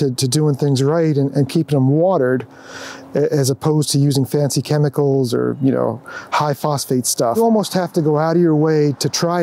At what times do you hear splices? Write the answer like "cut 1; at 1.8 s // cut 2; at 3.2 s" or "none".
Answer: cut 1; at 7.4 s